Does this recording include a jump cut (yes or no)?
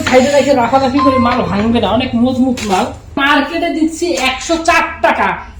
yes